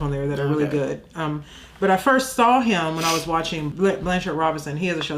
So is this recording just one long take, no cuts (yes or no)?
no